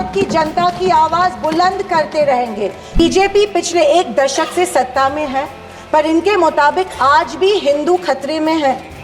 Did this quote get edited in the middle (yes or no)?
yes